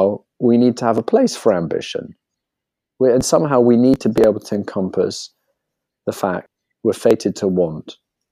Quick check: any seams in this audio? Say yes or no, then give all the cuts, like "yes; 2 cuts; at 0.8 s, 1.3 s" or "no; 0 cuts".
yes; 1 cut; at 6.5 s